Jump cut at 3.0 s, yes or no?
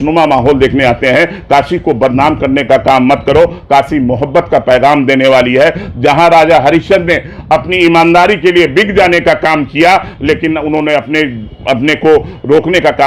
no